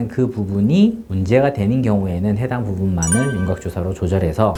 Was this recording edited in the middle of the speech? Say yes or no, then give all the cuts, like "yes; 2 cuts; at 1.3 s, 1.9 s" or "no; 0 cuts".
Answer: no; 0 cuts